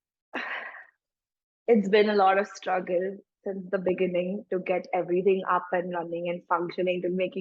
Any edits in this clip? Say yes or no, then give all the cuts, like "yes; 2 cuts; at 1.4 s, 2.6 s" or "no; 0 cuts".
no; 0 cuts